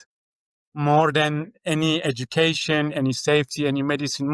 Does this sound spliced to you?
no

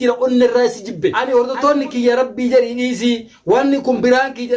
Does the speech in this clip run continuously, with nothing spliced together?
no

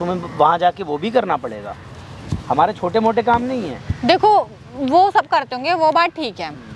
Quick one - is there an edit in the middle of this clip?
no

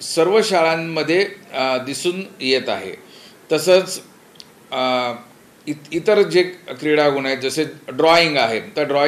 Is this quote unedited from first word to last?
yes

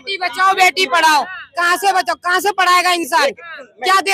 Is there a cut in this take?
no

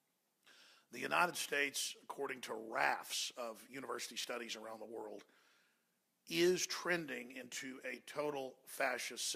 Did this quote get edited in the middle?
yes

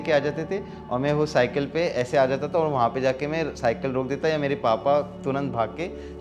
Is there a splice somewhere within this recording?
no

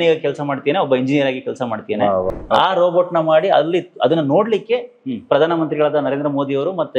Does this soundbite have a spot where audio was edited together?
yes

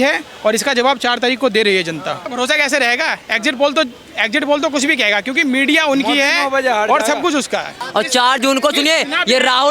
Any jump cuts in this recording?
yes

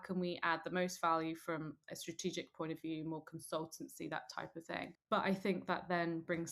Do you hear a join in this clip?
yes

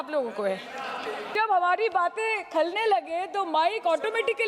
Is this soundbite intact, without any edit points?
no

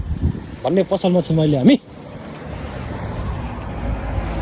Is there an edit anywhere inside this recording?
no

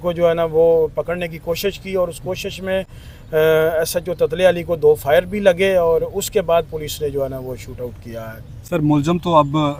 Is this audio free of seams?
yes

